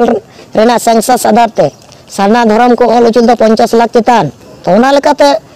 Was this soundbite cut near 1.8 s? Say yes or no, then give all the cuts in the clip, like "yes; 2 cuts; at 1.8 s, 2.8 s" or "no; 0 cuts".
no; 1 cut; at 4.4 s